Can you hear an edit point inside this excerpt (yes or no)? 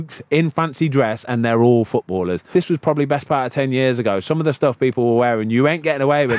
yes